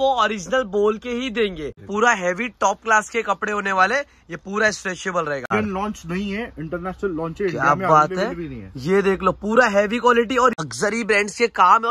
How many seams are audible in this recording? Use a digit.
3